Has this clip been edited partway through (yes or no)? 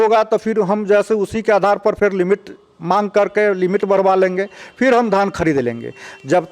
no